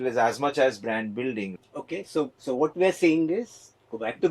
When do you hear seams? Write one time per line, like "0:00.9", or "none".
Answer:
0:01.5